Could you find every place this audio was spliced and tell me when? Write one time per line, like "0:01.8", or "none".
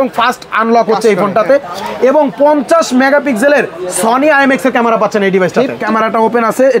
0:05.8